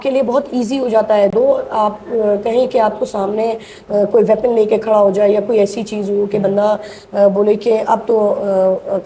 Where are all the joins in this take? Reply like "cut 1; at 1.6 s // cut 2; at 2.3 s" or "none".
none